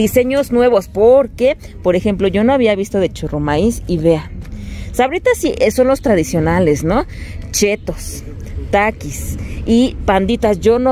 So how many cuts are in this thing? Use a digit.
0